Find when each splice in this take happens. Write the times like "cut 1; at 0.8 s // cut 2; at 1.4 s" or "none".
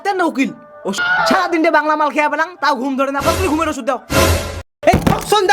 cut 1; at 1.0 s